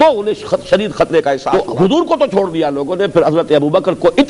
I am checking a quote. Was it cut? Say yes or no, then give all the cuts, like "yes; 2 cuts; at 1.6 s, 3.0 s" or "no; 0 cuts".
yes; 1 cut; at 1.4 s